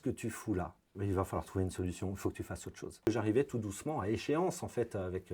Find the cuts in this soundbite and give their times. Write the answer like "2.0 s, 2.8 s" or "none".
0.9 s, 3.1 s